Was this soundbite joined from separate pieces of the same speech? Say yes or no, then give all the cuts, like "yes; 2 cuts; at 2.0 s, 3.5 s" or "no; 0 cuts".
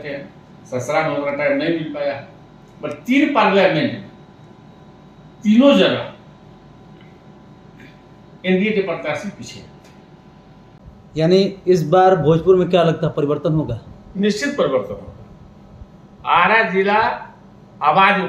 yes; 1 cut; at 10.8 s